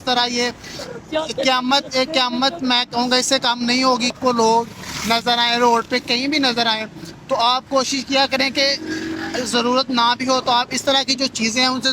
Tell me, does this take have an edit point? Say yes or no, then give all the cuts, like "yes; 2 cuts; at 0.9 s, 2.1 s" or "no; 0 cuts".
yes; 1 cut; at 4.2 s